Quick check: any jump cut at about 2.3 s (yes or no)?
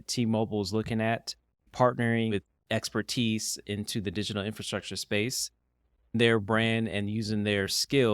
yes